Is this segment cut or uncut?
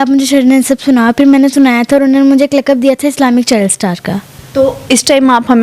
cut